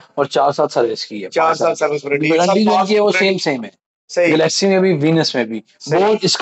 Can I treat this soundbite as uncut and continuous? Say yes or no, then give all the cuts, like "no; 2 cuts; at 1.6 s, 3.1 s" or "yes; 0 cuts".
yes; 0 cuts